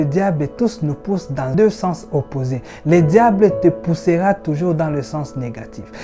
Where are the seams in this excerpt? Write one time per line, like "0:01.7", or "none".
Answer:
0:01.5

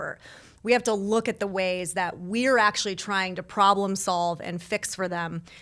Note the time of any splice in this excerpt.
none

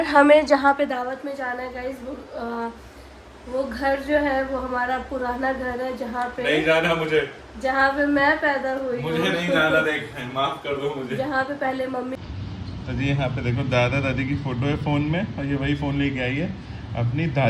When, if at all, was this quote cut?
0:12.1

